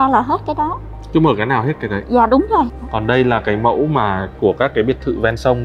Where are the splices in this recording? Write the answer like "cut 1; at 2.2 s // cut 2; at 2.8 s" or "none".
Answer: cut 1; at 2.8 s